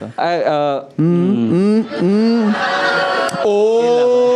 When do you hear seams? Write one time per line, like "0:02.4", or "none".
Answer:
none